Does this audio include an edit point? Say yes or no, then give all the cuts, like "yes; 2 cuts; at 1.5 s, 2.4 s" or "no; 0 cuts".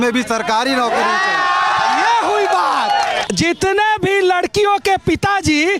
no; 0 cuts